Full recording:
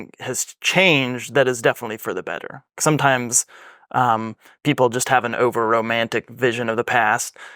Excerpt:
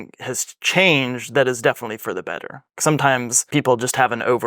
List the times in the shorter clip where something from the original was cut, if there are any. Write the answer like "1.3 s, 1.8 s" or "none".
3.4 s

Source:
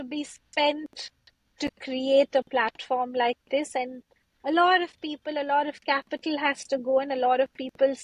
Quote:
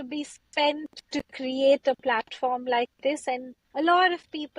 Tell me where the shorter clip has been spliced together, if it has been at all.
0.9 s, 3.6 s

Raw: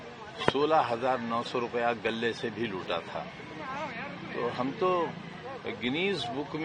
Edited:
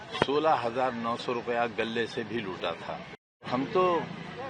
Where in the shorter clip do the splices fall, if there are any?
3.5 s

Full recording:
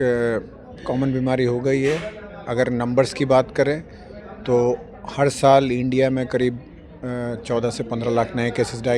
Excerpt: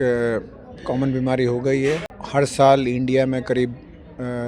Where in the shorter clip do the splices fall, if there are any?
2.1 s

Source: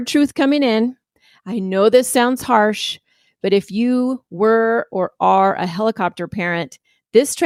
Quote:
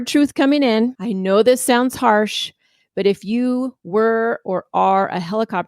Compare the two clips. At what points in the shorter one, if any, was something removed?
1.1 s

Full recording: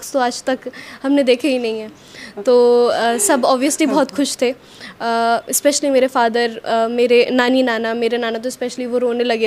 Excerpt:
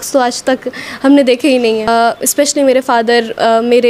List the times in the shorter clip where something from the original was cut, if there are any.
1.9 s

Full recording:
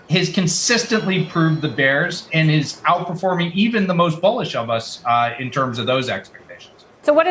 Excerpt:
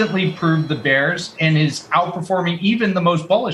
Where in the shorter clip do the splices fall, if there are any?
none

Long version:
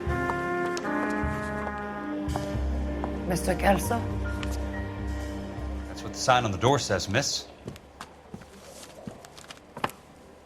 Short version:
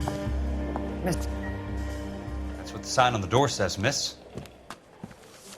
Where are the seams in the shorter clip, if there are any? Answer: 1.0 s

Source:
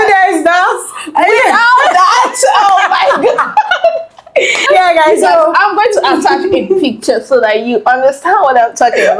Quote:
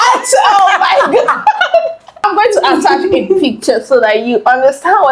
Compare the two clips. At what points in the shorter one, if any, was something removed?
2.2 s

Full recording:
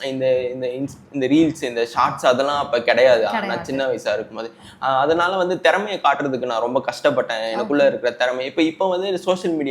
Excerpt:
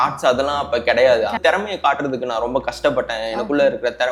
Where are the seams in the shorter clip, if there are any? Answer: 1.4 s

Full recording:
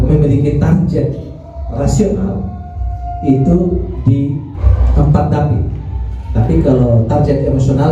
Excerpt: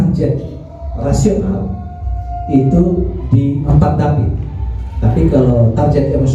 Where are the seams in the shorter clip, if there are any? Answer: 3.7 s

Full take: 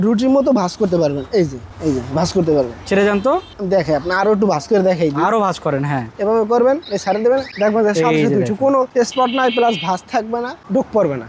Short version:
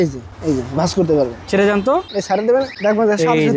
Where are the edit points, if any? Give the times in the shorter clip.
2.1 s

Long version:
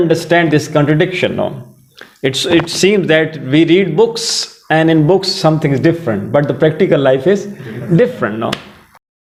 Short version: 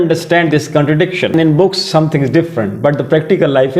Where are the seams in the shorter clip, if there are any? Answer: 1.3 s

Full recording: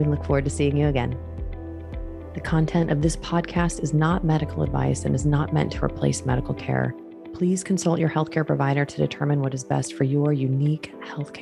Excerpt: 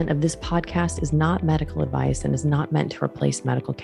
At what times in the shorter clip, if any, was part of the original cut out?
none

